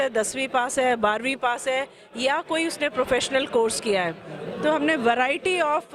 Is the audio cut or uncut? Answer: uncut